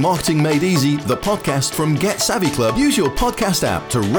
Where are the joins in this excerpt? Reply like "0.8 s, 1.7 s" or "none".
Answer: none